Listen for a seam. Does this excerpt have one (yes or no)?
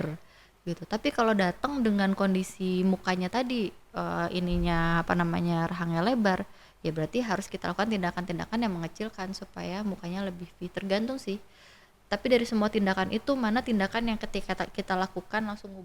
no